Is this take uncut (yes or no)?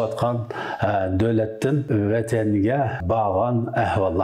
no